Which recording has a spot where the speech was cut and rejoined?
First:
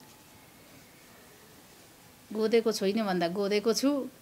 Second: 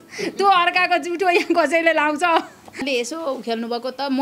second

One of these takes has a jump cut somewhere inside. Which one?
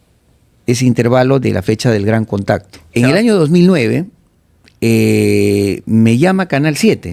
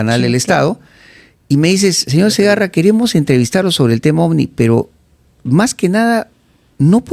first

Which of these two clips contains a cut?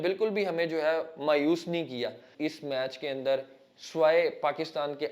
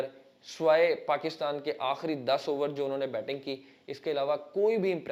first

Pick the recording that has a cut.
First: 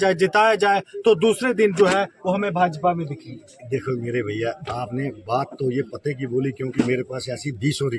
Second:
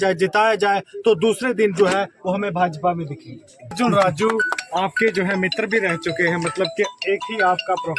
second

